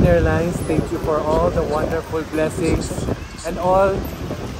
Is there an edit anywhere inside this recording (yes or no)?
no